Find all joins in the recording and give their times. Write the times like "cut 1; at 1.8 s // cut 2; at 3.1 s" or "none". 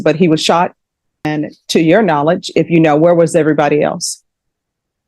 cut 1; at 1.2 s